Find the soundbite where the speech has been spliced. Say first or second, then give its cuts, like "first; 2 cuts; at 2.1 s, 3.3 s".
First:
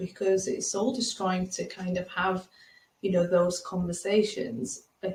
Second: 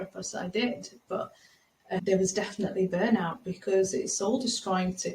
second; 1 cut; at 2.0 s